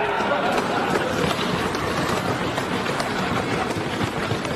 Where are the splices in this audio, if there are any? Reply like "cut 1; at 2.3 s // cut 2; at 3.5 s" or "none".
cut 1; at 1.0 s // cut 2; at 3.4 s